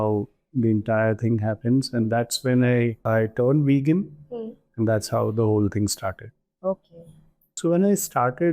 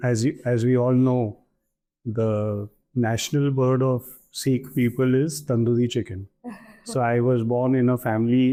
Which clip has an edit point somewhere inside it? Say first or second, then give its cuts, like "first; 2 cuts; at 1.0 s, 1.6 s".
first; 2 cuts; at 3.0 s, 7.4 s